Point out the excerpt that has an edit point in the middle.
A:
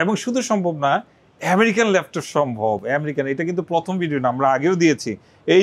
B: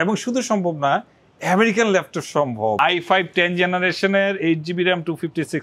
B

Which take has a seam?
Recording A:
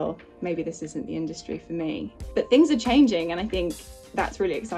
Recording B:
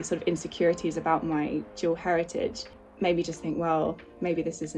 B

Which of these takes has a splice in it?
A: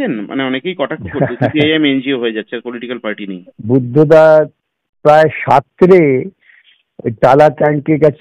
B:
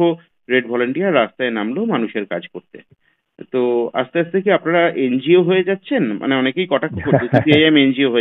A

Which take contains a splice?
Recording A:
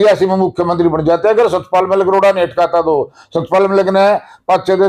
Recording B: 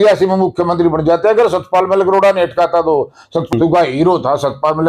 B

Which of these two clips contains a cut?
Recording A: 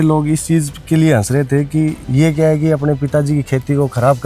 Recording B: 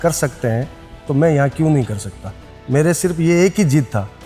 A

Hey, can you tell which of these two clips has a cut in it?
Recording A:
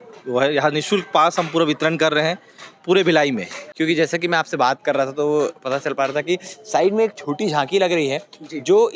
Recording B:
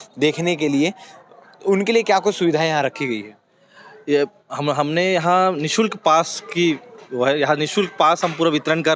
A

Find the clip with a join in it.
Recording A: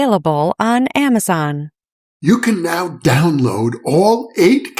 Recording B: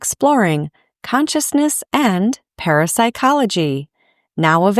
A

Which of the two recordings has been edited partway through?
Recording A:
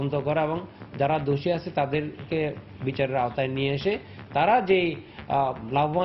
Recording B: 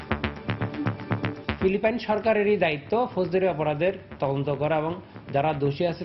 B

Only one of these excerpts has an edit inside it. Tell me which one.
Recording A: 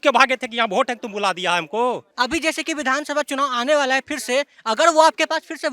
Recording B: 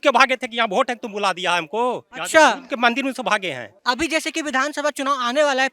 A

